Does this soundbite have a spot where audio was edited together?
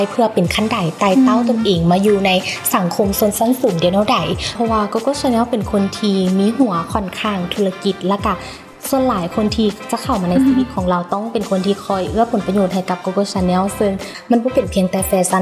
yes; 2 cuts; at 4.5 s, 14.1 s

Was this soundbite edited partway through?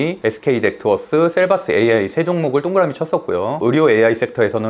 no; 0 cuts

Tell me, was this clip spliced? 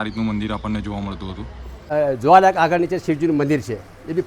yes; 1 cut; at 1.8 s

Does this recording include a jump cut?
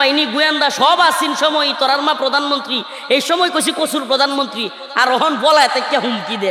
no; 0 cuts

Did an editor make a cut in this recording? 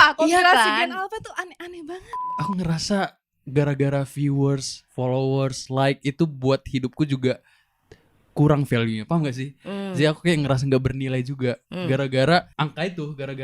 yes; 2 cuts; at 2.1 s, 12.5 s

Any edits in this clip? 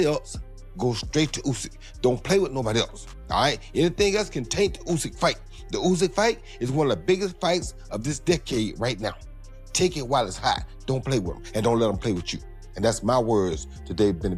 no; 0 cuts

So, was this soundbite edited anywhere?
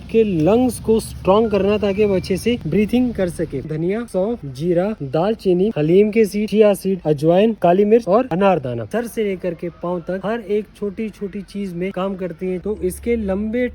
yes; 4 cuts; at 3.7 s, 7.6 s, 8.9 s, 12.6 s

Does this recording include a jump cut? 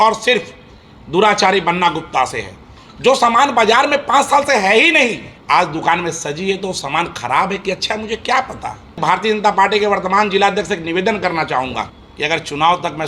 yes; 3 cuts; at 5.3 s, 9.0 s, 12.0 s

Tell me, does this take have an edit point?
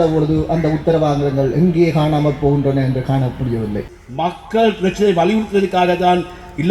yes; 1 cut; at 3.7 s

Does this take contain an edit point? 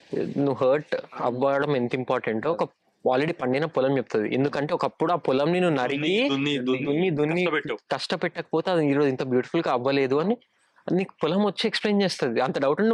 no; 0 cuts

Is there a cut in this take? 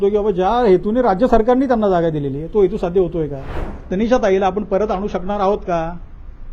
yes; 1 cut; at 3.7 s

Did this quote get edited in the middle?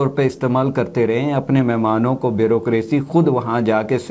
no; 0 cuts

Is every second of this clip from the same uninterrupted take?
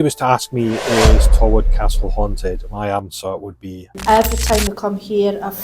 no; 1 cut; at 3.9 s

